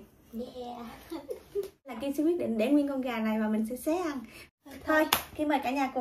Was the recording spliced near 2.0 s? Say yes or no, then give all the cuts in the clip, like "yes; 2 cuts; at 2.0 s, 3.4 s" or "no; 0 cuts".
yes; 2 cuts; at 2.0 s, 4.5 s